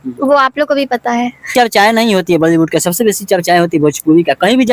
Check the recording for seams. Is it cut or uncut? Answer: cut